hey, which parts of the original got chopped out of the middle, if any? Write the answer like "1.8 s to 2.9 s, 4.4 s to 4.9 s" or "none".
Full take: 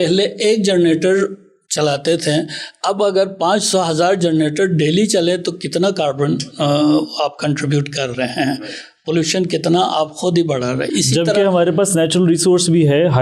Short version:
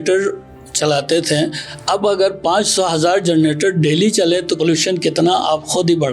5.5 s to 9.0 s